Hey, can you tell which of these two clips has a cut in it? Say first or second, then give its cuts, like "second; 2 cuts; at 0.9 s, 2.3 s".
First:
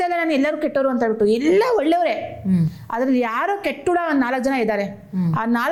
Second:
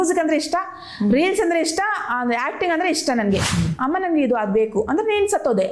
second; 1 cut; at 3.5 s